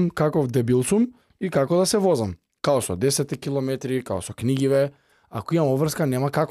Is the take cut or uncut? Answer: uncut